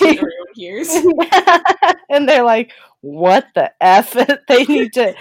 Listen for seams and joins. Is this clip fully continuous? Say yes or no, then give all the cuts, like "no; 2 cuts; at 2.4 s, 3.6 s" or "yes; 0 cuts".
yes; 0 cuts